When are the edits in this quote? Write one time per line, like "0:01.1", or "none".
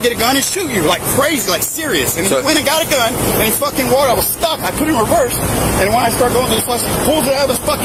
none